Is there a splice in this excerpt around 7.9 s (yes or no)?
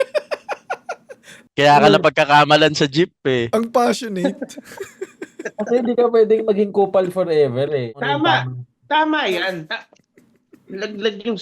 yes